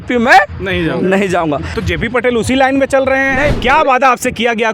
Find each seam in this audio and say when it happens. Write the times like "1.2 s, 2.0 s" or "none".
1.7 s, 3.5 s